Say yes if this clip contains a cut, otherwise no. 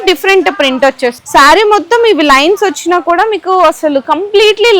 yes